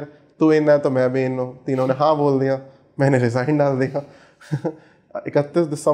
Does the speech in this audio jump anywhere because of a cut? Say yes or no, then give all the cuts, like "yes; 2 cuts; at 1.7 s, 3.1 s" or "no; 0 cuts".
no; 0 cuts